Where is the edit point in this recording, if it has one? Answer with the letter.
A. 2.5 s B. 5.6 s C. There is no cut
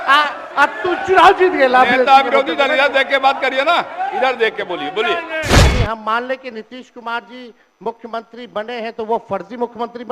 B